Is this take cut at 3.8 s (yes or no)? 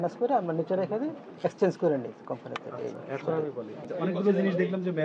yes